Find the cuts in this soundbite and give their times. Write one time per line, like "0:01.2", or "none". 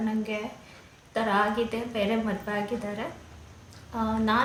none